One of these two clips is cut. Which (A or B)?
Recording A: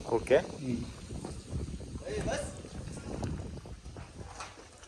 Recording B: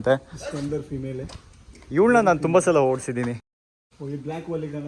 B